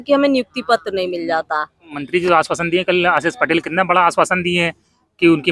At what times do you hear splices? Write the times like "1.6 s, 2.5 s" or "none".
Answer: 1.9 s